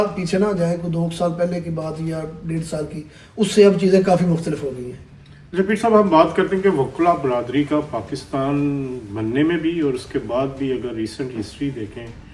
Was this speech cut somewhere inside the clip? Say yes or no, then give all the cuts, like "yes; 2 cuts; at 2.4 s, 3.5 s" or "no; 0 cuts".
no; 0 cuts